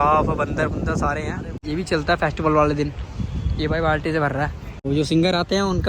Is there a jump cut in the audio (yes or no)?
yes